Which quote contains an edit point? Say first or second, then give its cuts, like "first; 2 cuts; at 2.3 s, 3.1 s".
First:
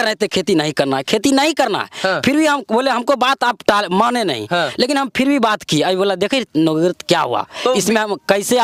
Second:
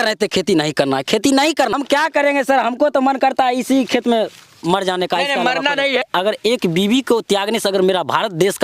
second; 2 cuts; at 1.7 s, 6.1 s